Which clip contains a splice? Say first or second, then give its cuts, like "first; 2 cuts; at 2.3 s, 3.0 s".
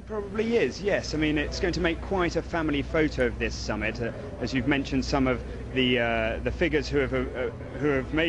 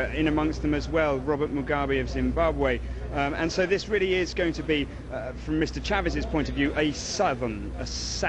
first; 1 cut; at 6.5 s